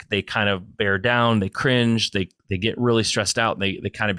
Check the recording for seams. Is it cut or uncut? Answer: uncut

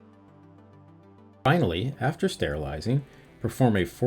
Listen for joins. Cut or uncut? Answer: cut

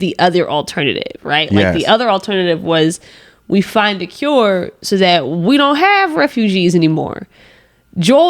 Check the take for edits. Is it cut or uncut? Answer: uncut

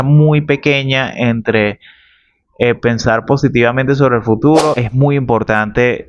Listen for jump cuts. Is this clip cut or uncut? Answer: cut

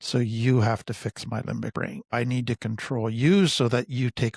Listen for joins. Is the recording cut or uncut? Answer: cut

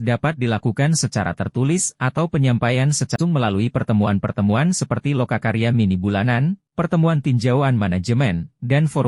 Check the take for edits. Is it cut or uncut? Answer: cut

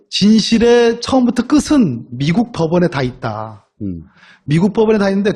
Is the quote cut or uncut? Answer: cut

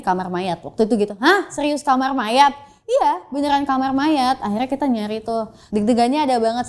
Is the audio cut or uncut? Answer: cut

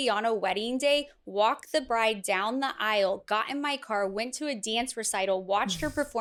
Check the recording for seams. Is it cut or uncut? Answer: uncut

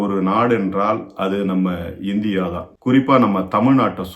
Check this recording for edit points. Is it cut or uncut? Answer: cut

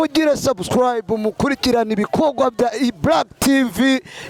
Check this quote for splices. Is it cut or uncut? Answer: uncut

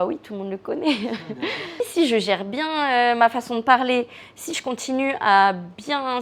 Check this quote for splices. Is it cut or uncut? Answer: cut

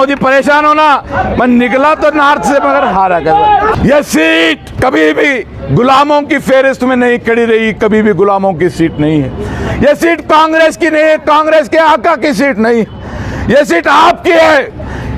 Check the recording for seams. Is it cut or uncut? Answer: cut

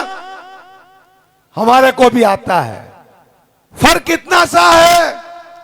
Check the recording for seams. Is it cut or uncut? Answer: uncut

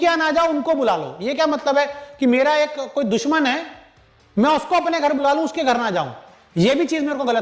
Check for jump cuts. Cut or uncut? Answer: uncut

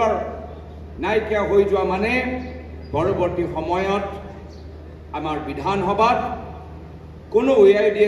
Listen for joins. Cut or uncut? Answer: uncut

